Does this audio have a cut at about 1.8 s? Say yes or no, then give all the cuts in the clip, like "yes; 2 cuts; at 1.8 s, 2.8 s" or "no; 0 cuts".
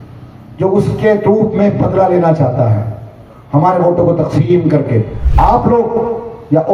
no; 1 cut; at 5.2 s